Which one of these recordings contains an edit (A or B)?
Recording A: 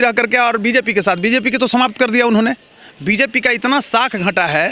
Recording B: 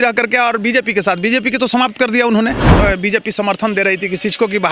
B